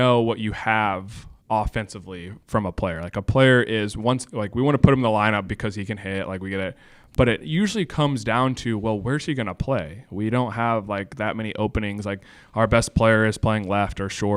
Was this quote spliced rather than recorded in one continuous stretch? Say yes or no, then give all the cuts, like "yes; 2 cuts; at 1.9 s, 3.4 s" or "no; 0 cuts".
no; 0 cuts